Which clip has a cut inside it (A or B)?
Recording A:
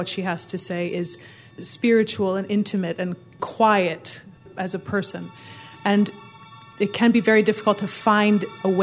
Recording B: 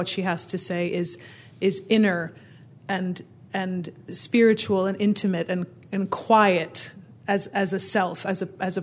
A